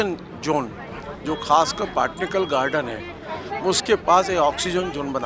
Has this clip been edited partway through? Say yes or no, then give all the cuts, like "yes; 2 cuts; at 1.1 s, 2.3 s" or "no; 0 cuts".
no; 0 cuts